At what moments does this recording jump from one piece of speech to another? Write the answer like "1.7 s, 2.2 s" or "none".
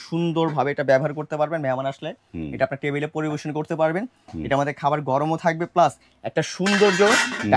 none